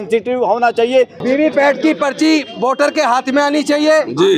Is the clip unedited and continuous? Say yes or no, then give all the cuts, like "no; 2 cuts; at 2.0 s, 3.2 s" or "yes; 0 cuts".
no; 1 cut; at 1.2 s